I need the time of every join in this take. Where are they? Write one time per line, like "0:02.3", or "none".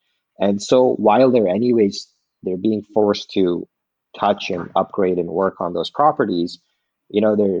none